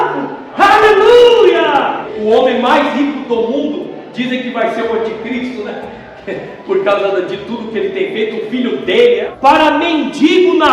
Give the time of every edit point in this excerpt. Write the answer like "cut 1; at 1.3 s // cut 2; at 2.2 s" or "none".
cut 1; at 2.1 s // cut 2; at 9.3 s